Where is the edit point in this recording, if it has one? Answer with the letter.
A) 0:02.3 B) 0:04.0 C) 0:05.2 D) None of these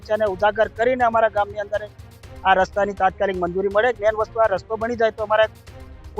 B